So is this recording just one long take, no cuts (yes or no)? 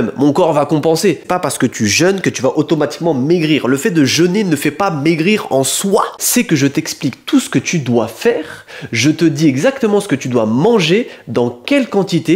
no